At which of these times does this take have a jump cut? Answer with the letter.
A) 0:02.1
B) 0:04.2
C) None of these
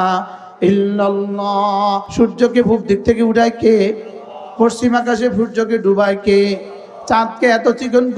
A